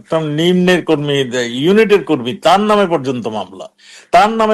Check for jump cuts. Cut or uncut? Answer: uncut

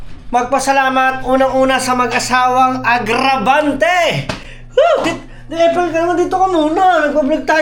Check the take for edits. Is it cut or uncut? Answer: uncut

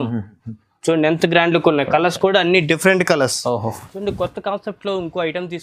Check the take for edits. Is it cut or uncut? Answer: cut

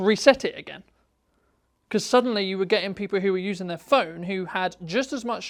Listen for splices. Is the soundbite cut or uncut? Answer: uncut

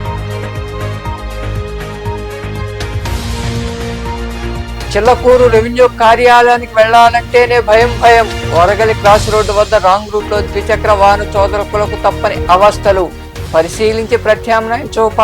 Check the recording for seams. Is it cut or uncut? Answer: cut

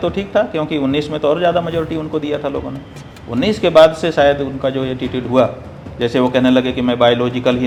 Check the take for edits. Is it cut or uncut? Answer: uncut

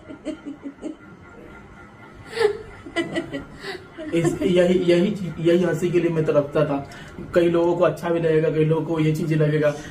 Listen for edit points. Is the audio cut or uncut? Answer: uncut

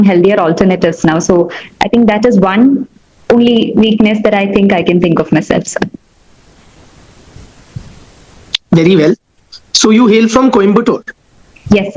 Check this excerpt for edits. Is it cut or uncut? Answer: uncut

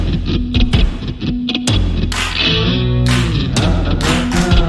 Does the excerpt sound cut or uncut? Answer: uncut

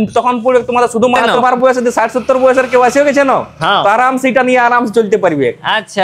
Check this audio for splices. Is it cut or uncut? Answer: cut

